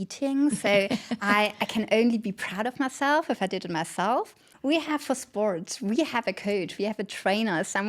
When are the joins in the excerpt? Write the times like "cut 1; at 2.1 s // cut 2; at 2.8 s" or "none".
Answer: cut 1; at 4.5 s